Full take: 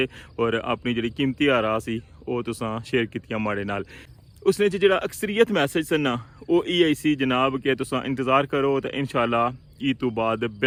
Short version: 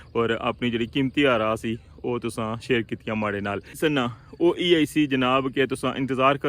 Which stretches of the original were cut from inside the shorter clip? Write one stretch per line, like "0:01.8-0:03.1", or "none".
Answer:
0:04.0-0:05.9

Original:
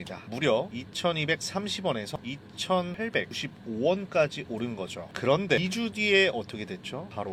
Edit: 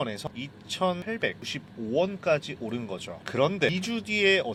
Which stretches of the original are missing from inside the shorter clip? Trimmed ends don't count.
none

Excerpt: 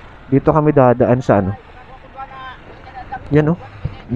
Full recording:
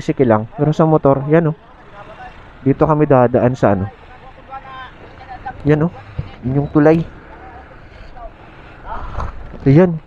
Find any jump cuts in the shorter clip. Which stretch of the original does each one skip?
none

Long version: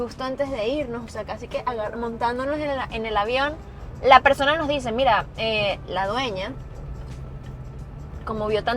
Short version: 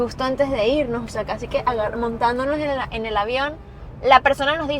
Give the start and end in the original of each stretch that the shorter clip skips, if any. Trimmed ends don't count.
none

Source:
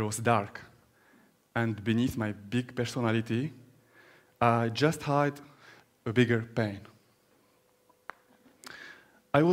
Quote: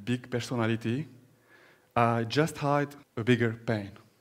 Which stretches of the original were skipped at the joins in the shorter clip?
0:05.5-0:05.9

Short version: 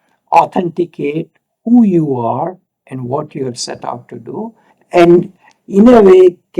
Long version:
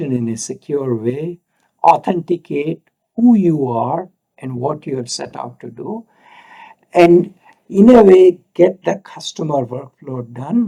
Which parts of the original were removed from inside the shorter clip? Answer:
0:06.2-0:06.7

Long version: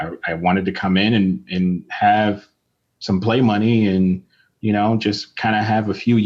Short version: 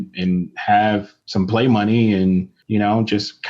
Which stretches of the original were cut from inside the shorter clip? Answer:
0:02.5-0:02.9
0:04.3-0:04.5

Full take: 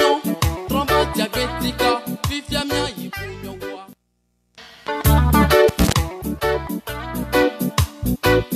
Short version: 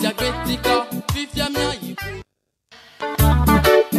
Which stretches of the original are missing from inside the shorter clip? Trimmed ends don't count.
0:03.3-0:04.0

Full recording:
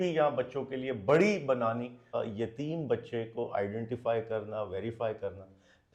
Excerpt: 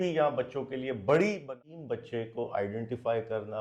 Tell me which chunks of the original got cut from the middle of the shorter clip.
0:01.5-0:02.5

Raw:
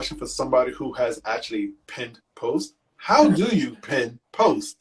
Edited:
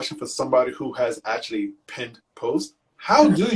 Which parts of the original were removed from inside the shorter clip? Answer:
none

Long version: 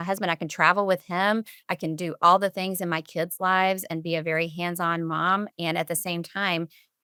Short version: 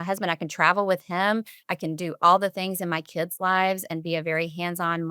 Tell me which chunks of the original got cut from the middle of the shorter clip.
none

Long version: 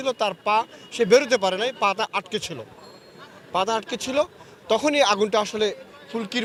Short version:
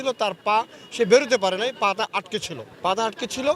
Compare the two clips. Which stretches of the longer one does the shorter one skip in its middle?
0:02.6-0:03.3

